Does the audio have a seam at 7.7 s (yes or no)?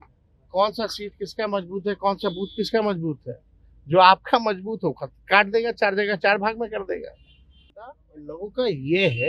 yes